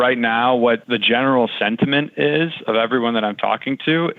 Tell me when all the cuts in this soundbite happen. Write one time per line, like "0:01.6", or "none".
none